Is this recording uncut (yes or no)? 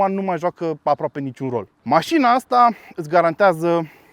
no